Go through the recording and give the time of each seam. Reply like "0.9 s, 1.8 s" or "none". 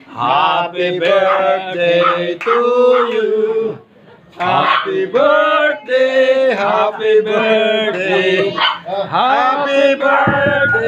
none

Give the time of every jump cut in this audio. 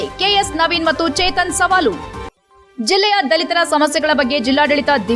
none

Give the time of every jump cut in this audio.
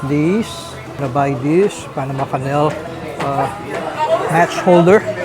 0.9 s

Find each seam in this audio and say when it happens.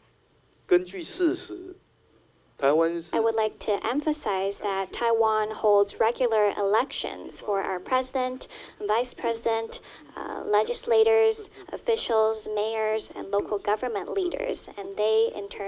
3.1 s

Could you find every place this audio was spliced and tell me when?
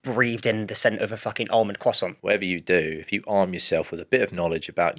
2.2 s

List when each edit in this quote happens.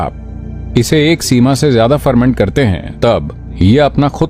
3.4 s

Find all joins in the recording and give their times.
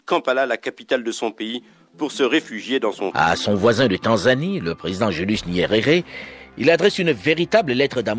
3.1 s

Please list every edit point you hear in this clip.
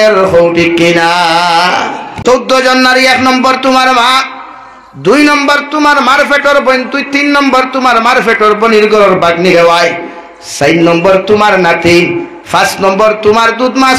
2.2 s

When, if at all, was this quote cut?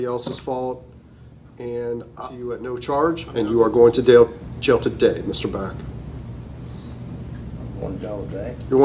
2.6 s

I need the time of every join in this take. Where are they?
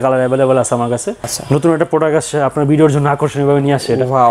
1.2 s

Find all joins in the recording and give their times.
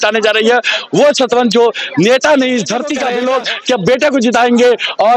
3.0 s

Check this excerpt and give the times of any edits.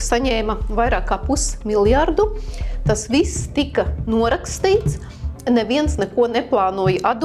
none

